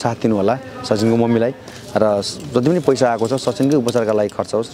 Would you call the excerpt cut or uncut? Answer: uncut